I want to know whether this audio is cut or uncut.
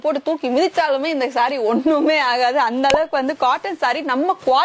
uncut